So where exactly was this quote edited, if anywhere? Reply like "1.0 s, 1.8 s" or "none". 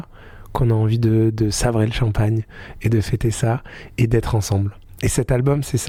none

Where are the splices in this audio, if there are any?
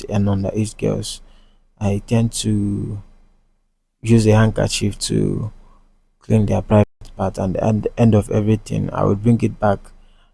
none

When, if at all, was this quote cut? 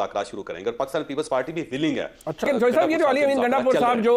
2.5 s

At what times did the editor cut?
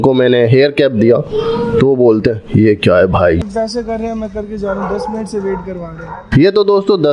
3.4 s

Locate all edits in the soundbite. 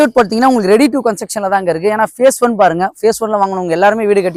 none

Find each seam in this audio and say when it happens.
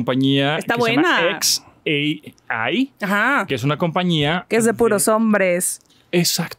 none

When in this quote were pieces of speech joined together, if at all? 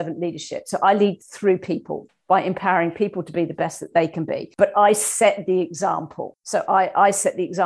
none

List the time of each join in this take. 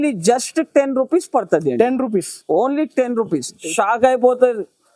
3.6 s

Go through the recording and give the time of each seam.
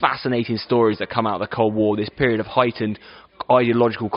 none

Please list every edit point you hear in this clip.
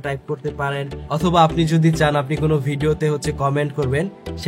none

